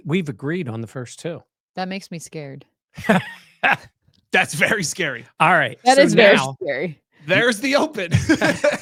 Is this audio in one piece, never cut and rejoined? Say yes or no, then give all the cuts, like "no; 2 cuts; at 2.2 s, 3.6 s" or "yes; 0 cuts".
yes; 0 cuts